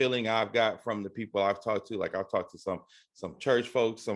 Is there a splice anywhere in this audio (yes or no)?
no